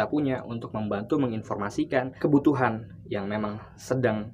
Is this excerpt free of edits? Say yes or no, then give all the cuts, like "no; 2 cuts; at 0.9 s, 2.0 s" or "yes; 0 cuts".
no; 1 cut; at 2.1 s